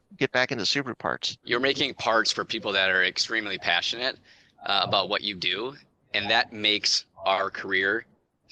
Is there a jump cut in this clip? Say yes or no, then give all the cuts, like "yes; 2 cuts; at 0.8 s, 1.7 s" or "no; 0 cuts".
yes; 1 cut; at 1.3 s